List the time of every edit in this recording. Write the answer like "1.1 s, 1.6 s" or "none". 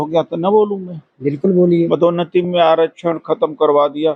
none